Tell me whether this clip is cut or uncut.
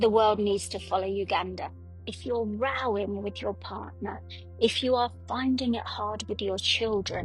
cut